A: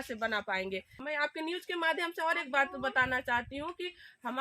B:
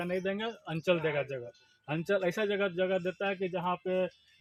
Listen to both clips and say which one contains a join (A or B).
A